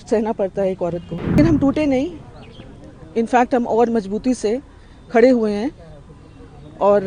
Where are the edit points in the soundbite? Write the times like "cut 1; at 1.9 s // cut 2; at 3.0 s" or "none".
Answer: cut 1; at 1.4 s